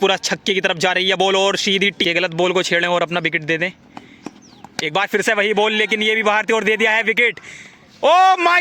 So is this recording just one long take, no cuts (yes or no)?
no